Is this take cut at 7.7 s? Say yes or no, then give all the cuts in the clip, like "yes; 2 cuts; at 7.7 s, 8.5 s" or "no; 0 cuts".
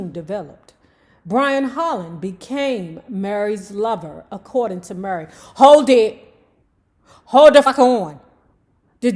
yes; 1 cut; at 7.7 s